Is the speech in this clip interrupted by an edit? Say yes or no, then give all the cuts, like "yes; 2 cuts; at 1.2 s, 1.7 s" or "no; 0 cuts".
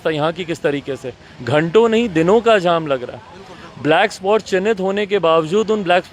no; 0 cuts